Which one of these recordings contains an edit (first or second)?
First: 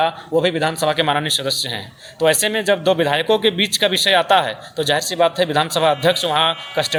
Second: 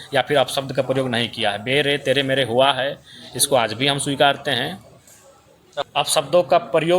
second